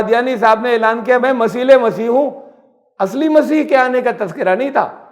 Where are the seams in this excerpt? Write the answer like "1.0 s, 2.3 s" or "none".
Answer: 1.2 s